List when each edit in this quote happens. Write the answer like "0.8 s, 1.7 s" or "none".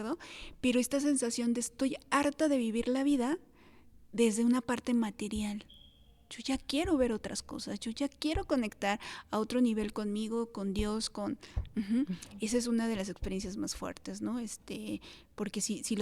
none